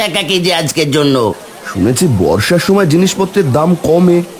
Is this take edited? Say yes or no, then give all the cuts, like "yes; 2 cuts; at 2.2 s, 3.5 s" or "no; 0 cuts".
yes; 1 cut; at 1.5 s